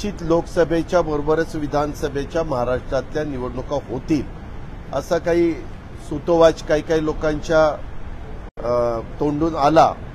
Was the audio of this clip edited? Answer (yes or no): no